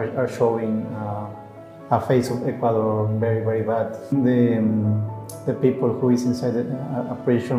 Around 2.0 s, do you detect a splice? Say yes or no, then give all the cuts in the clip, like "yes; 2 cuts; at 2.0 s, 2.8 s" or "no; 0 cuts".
no; 1 cut; at 4.1 s